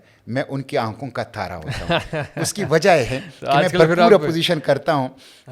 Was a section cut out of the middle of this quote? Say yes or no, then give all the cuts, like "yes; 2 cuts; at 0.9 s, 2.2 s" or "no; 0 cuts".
no; 0 cuts